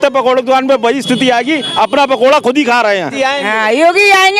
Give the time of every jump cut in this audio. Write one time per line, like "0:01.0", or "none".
0:03.2